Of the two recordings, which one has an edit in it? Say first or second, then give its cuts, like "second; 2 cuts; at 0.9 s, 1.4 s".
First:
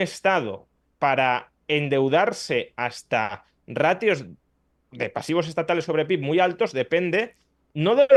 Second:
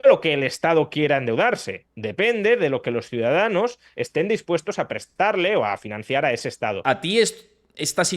second; 1 cut; at 6.8 s